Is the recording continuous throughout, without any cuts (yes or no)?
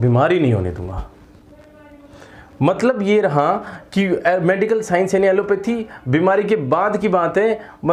yes